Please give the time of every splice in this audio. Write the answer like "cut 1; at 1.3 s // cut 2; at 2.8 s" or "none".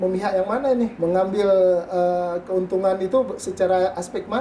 cut 1; at 0.9 s